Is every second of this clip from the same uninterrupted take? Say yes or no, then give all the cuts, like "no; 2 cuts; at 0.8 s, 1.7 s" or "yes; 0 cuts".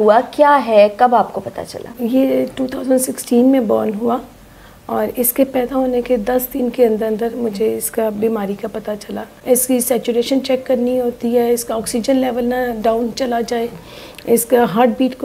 no; 2 cuts; at 1.9 s, 9.3 s